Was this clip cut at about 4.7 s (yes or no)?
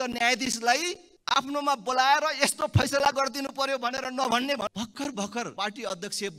yes